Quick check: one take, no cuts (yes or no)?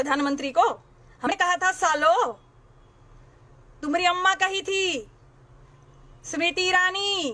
no